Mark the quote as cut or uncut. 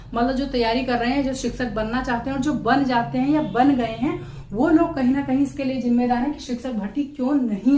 uncut